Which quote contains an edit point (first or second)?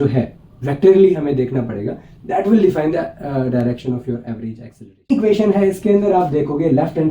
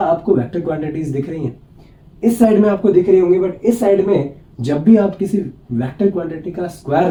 first